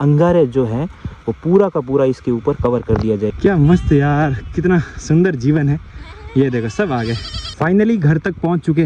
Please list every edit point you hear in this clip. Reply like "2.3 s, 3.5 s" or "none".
3.3 s, 7.4 s